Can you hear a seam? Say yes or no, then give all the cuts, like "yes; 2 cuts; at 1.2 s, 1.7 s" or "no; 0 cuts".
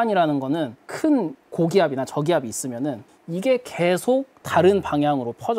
yes; 1 cut; at 4.4 s